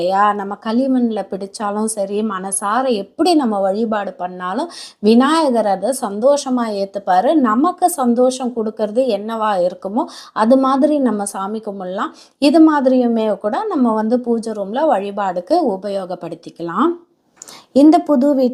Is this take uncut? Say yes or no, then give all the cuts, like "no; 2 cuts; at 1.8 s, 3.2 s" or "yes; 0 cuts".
yes; 0 cuts